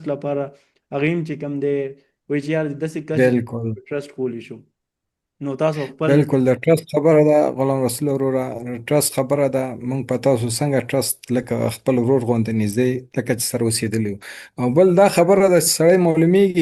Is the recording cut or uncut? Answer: uncut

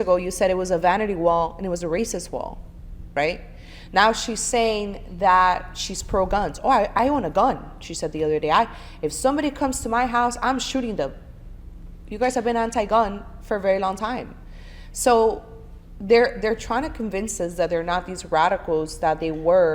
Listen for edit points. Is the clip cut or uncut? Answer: uncut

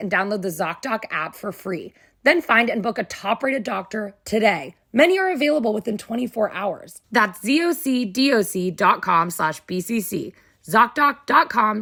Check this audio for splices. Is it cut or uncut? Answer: uncut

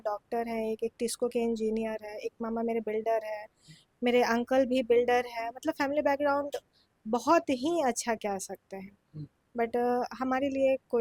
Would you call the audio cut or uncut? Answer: uncut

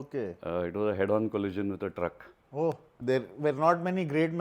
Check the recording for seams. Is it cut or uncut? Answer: cut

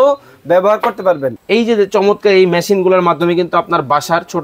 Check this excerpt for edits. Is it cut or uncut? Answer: cut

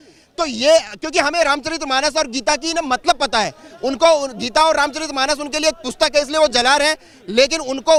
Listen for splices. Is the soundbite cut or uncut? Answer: uncut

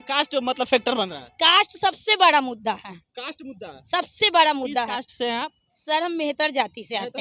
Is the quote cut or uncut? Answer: uncut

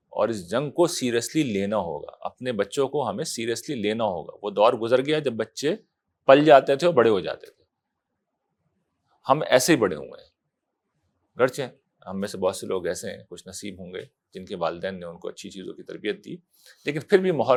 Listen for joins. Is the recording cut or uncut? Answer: uncut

